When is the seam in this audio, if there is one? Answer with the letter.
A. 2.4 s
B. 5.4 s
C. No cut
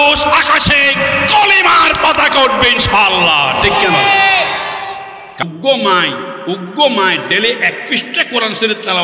B